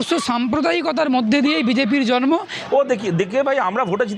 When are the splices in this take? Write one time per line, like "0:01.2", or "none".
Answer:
0:02.5